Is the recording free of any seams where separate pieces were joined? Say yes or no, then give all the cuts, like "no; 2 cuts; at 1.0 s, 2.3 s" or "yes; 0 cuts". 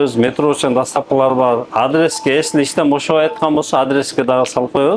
yes; 0 cuts